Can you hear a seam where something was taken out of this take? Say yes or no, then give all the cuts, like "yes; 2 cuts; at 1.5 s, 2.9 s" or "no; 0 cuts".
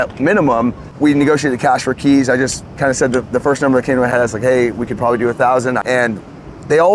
yes; 2 cuts; at 0.8 s, 5.8 s